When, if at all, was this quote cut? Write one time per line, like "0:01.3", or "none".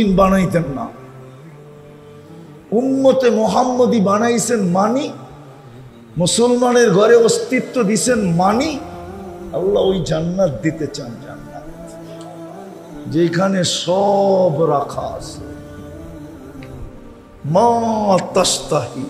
0:15.6
0:17.3